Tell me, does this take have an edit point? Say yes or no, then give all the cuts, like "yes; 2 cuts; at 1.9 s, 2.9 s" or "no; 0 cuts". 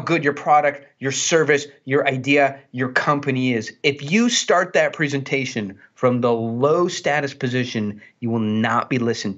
no; 0 cuts